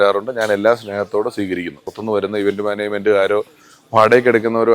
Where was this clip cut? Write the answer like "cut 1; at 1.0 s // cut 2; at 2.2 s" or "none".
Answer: cut 1; at 2.0 s